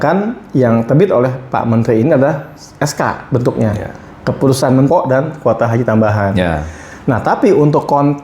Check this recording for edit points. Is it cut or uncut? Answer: cut